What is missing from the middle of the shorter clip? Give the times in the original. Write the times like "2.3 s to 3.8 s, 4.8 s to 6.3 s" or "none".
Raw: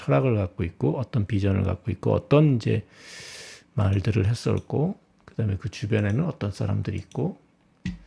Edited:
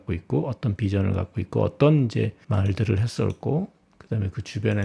2.9 s to 3.7 s